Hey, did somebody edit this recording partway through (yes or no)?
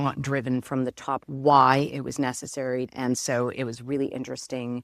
yes